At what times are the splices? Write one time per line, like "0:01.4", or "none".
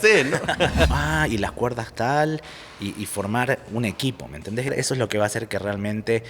0:00.9
0:04.7